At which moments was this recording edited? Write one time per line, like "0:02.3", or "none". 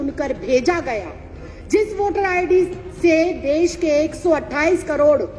none